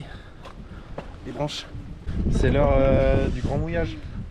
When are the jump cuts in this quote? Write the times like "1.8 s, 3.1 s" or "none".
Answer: 2.0 s

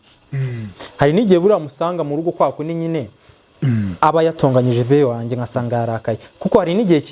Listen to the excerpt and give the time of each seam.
none

